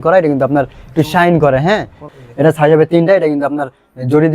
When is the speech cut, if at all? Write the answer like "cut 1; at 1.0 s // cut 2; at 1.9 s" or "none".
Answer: cut 1; at 2.1 s